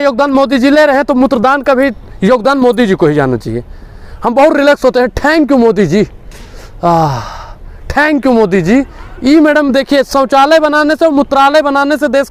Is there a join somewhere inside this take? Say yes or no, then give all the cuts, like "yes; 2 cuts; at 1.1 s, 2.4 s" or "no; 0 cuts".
no; 0 cuts